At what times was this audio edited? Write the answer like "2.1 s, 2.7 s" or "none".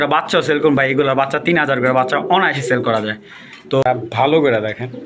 3.8 s

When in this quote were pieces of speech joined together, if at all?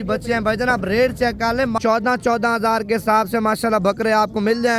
1.8 s

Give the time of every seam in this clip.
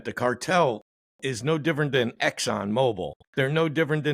3.2 s

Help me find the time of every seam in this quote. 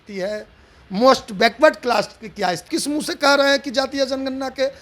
2.7 s

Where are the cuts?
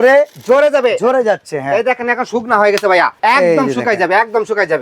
3.1 s

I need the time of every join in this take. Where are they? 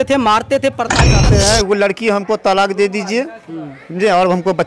1.2 s

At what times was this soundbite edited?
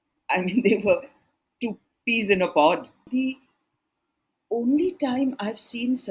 3.1 s

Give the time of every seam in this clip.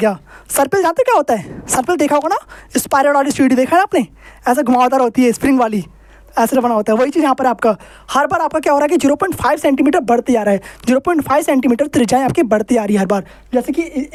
none

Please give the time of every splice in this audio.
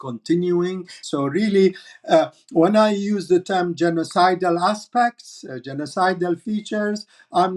1.0 s

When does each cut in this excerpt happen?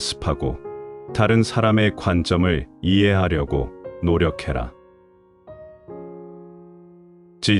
none

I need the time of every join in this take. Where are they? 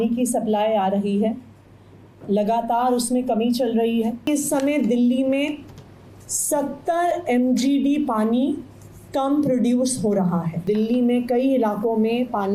4.3 s, 10.6 s

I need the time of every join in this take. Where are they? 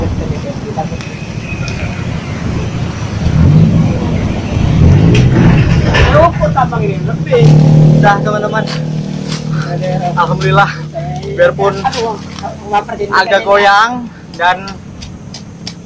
7.6 s

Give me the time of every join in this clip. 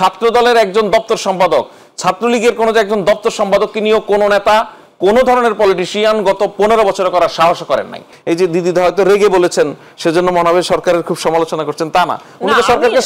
8.1 s

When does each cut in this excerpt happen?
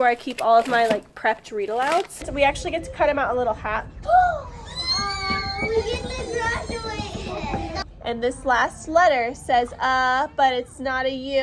2.3 s, 7.8 s

